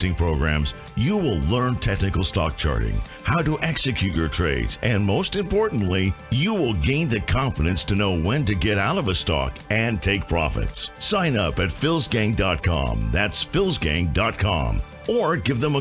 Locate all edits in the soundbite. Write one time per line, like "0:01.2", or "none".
none